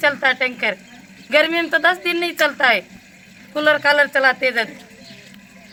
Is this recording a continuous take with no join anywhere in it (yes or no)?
yes